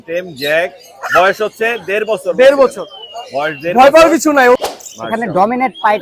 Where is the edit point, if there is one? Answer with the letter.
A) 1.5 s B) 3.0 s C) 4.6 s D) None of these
C